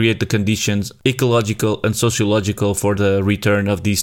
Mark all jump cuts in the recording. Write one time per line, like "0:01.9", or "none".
0:00.9